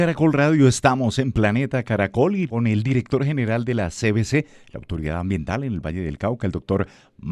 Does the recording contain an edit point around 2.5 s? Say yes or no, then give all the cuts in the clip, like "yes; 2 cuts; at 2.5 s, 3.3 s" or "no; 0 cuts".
yes; 1 cut; at 2.5 s